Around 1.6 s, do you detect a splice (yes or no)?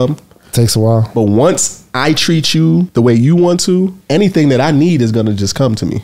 no